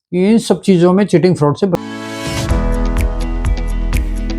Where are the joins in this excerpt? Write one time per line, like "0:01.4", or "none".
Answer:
0:01.8